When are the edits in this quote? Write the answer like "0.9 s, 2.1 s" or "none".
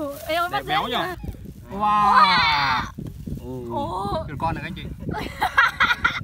1.2 s